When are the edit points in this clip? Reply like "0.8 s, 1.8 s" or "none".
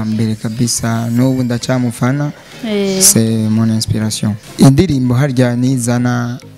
4.4 s